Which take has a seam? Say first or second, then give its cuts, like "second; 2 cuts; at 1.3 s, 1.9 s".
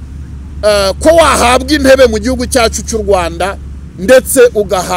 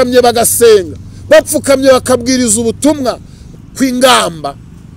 second; 1 cut; at 3.5 s